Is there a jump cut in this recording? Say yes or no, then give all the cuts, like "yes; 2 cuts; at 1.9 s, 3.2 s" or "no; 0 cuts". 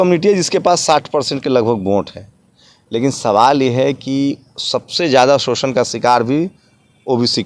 no; 0 cuts